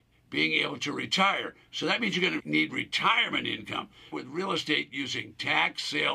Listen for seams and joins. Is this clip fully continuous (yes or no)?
no